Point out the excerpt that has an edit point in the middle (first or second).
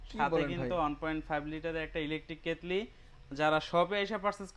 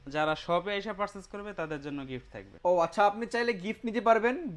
second